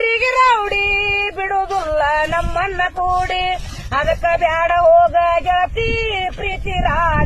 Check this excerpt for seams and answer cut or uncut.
uncut